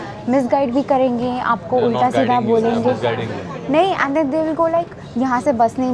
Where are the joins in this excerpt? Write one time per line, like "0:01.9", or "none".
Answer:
none